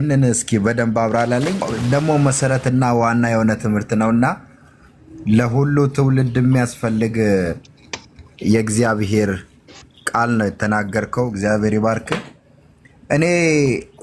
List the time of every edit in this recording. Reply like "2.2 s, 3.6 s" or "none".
1.7 s